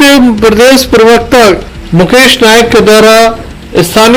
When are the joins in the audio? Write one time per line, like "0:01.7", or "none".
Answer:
none